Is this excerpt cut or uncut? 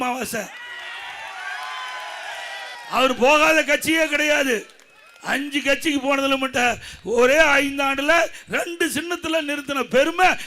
cut